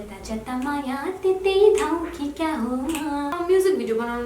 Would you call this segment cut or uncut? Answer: cut